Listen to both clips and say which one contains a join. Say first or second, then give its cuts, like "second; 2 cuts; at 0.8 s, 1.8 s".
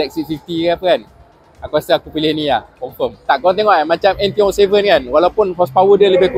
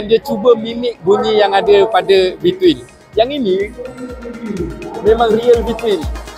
first; 1 cut; at 3.2 s